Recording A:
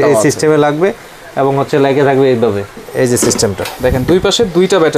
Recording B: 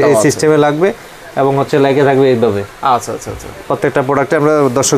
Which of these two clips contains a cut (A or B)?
A